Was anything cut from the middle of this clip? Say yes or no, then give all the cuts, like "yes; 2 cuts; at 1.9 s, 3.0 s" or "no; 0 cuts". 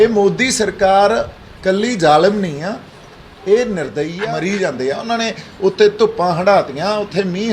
yes; 1 cut; at 4.1 s